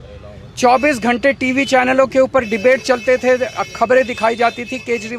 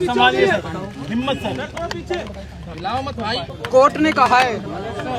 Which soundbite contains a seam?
second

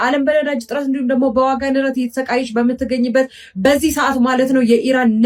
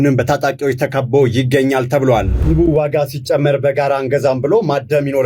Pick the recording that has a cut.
second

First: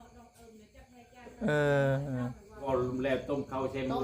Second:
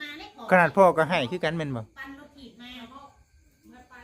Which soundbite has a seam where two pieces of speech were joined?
first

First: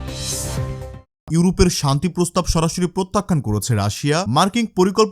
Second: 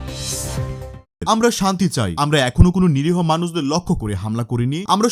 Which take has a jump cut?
first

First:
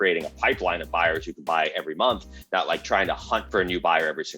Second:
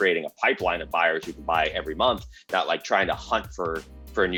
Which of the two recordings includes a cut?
first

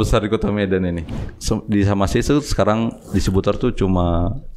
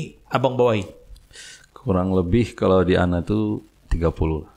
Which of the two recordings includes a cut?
first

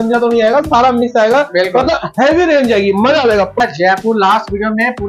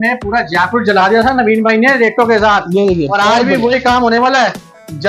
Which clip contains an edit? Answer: first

